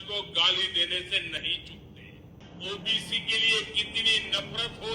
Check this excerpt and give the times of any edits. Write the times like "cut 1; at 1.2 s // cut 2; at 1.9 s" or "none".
cut 1; at 2.4 s

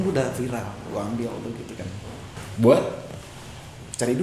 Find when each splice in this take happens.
none

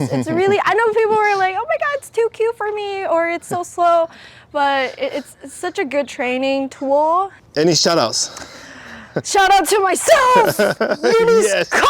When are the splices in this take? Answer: cut 1; at 7.4 s

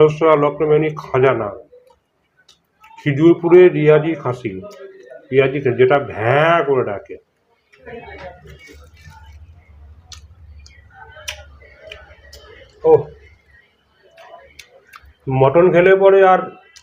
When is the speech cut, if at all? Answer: cut 1; at 7.9 s

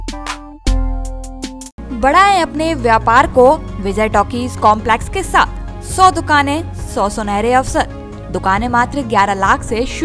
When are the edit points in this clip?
none

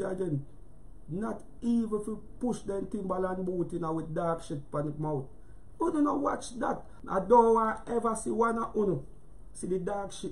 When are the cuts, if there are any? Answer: cut 1; at 6.9 s

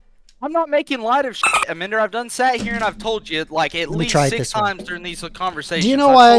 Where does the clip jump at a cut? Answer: none

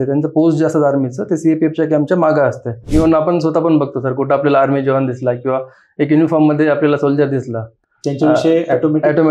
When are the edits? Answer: cut 1; at 2.9 s

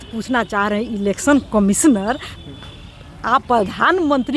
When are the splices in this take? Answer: cut 1; at 3.4 s

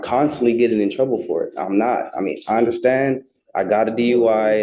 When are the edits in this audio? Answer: none

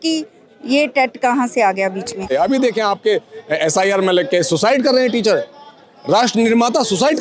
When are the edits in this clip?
cut 1; at 2.3 s

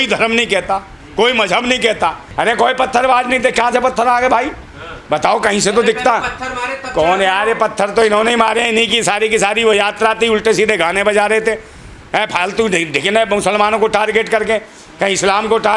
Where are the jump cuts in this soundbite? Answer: cut 1; at 2.2 s

